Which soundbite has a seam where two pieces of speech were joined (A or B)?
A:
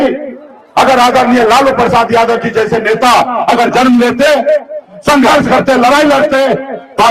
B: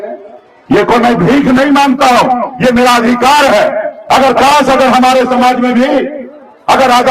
B